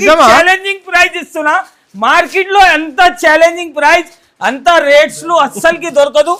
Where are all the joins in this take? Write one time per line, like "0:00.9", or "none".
none